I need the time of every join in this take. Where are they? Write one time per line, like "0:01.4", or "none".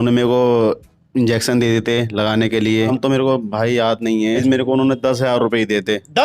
0:02.9
0:04.4